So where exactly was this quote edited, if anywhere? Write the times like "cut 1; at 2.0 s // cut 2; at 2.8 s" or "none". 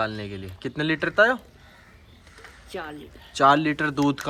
none